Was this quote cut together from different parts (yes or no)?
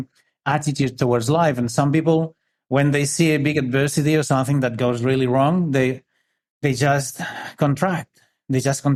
no